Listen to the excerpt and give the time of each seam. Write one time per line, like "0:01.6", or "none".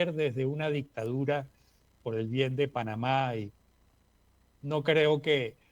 none